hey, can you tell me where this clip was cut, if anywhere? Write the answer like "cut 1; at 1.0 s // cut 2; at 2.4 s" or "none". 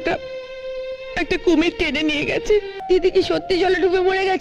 cut 1; at 2.7 s